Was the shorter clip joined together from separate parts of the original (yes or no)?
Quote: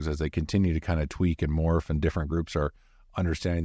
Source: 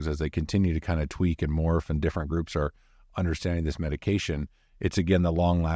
no